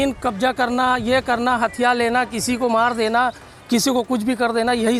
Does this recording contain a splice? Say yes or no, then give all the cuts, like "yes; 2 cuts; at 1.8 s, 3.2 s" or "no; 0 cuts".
no; 0 cuts